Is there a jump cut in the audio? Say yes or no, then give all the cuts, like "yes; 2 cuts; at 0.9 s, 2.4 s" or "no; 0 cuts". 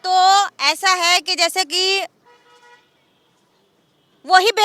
no; 0 cuts